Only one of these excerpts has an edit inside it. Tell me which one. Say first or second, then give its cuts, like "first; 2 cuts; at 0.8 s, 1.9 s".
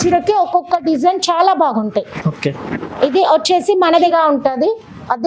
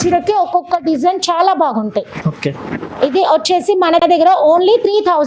first; 1 cut; at 4.0 s